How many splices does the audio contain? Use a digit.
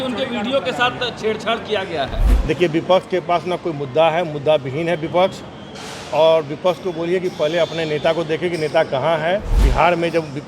2